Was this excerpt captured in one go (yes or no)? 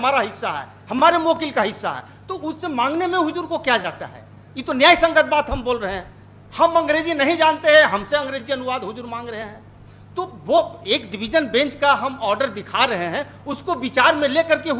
yes